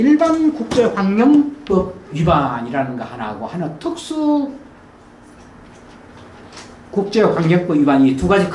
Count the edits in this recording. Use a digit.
0